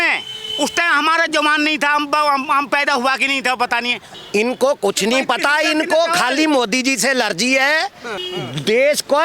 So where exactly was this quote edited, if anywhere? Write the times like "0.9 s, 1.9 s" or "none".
4.0 s, 8.1 s